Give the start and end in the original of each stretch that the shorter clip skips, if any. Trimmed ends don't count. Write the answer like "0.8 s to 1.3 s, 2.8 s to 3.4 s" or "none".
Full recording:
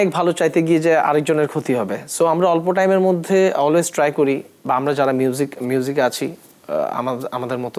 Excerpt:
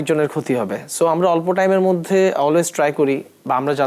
none

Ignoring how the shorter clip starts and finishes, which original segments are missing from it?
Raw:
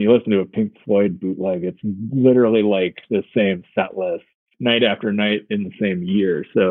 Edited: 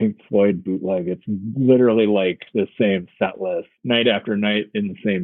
4.3 s to 4.5 s

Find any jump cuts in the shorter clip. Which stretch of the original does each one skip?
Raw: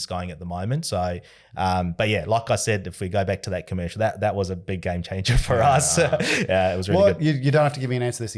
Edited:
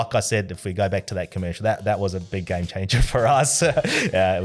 none

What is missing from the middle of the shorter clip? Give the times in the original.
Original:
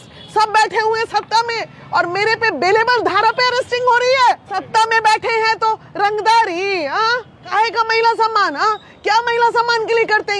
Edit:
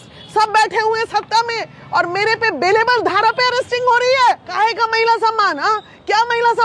4.4 s to 7.4 s

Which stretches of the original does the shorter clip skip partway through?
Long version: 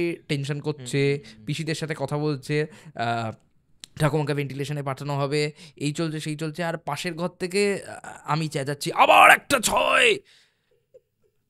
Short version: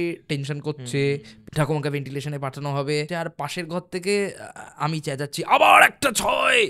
1.3 s to 3.8 s, 5.5 s to 6.6 s

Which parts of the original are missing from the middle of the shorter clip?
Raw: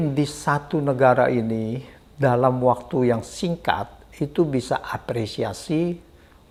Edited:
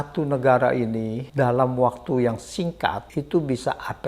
1.7 s to 2.0 s, 3.9 s to 4.1 s

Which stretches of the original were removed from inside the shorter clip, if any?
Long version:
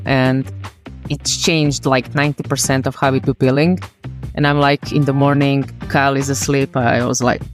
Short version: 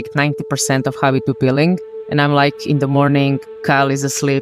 3.9 s to 4.2 s

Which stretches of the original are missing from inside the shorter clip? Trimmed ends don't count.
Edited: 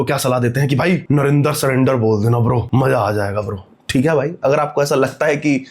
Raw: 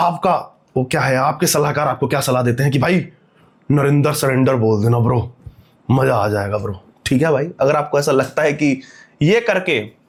3.1 s to 3.6 s, 5.2 s to 5.8 s

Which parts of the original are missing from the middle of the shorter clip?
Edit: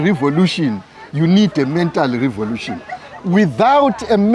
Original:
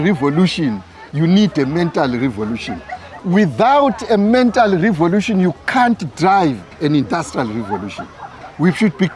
none

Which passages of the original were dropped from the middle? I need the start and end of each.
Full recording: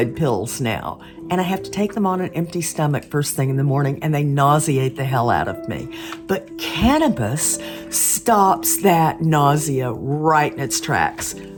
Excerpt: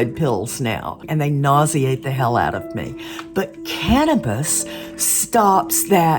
1.0 s to 4.0 s

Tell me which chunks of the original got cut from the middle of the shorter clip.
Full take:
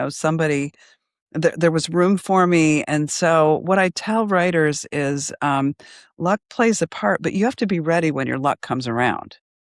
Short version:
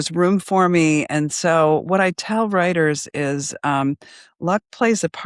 none

